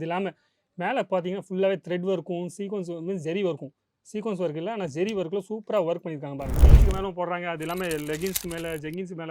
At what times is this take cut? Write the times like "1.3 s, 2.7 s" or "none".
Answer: 6.5 s